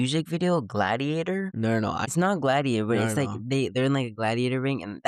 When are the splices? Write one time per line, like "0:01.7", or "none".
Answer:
0:01.8